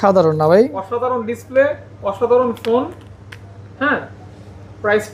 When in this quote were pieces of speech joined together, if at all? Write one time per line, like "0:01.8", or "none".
none